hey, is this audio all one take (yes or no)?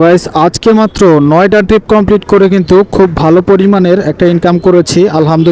yes